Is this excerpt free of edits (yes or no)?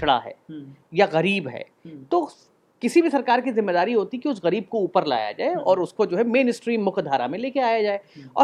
yes